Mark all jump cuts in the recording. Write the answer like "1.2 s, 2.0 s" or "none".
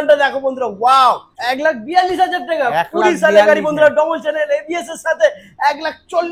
1.3 s